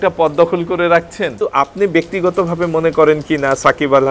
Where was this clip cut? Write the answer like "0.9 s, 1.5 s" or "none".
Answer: 1.3 s